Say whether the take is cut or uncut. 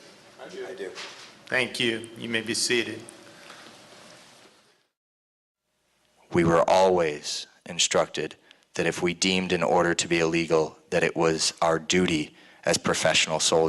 cut